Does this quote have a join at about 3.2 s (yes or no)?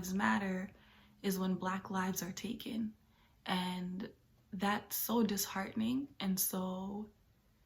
no